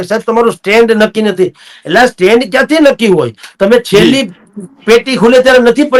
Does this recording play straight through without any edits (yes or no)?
yes